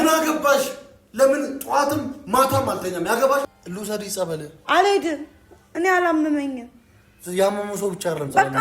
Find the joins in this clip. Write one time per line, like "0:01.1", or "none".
0:03.6